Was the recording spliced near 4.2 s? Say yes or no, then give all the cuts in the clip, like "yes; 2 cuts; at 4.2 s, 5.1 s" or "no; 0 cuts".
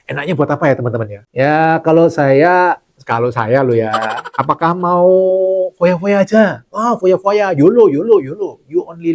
yes; 1 cut; at 4.2 s